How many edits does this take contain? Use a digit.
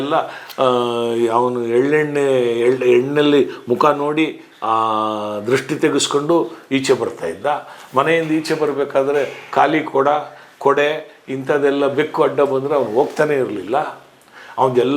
0